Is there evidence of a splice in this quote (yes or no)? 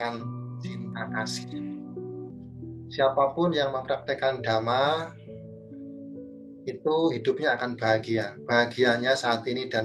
yes